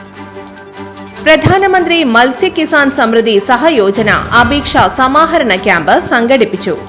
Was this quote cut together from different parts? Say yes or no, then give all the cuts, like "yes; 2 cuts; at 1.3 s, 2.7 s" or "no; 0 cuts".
no; 0 cuts